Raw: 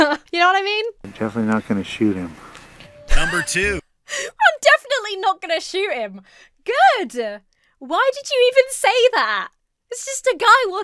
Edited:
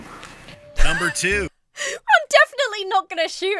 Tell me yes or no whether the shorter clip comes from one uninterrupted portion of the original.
yes